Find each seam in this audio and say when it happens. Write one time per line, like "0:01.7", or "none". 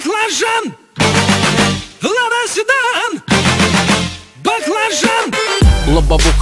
0:05.2